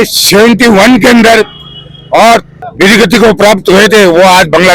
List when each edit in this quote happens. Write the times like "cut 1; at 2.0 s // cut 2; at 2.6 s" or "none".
cut 1; at 2.5 s